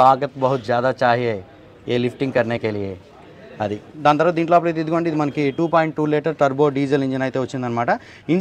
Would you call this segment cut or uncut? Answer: uncut